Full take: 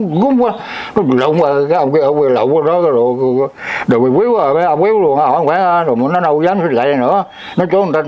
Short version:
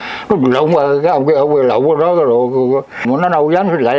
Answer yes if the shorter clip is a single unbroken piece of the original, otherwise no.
no